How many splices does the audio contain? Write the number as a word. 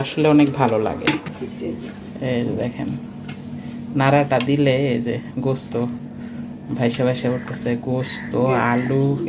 one